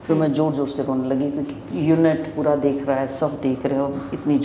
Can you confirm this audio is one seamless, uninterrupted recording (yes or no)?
yes